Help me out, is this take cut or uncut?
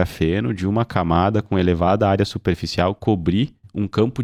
uncut